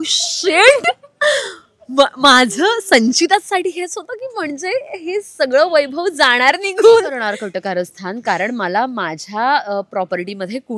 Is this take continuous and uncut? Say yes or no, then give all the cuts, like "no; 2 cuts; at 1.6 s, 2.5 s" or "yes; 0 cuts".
no; 1 cut; at 7.4 s